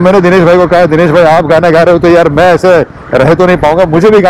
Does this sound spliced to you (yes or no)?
no